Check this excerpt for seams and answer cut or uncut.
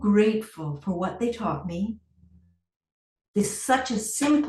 uncut